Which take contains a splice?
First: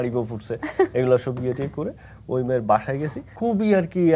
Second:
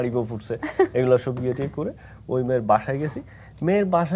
first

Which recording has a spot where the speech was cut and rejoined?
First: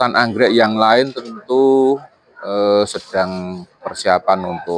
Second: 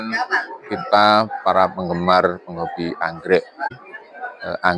second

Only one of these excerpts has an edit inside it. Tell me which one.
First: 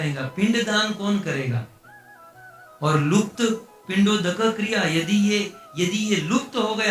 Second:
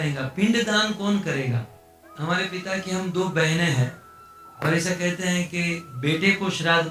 second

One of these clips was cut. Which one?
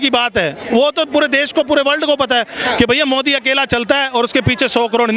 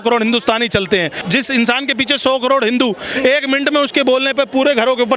second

